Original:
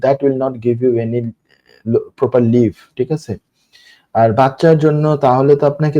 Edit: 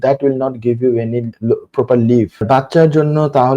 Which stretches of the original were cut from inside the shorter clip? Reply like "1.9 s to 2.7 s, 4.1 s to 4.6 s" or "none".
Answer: 1.3 s to 1.8 s, 2.9 s to 4.3 s

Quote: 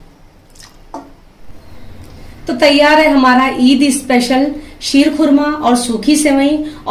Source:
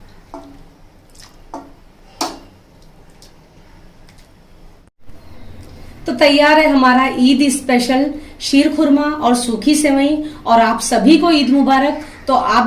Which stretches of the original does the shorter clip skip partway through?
1.9 s to 4.9 s

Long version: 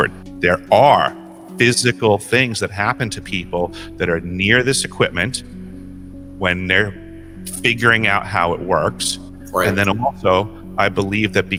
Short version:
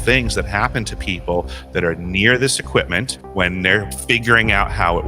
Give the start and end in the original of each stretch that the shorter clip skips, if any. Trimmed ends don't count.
5.4 s to 6.2 s, 7.0 s to 7.5 s

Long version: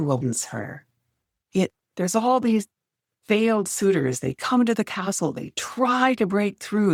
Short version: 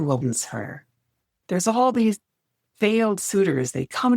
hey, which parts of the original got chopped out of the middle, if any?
1.3 s to 1.8 s

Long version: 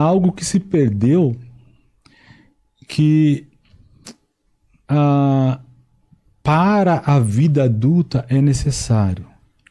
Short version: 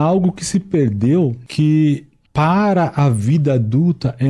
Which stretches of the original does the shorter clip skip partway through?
1.4 s to 2.8 s, 3.6 s to 6.3 s

